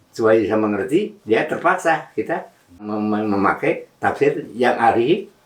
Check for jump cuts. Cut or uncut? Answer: cut